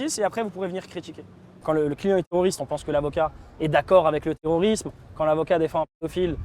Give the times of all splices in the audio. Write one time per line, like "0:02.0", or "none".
0:01.6